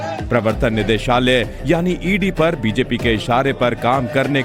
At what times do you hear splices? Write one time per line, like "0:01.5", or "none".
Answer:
0:02.0